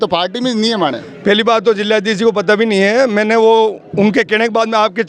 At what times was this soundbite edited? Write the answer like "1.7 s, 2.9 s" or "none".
none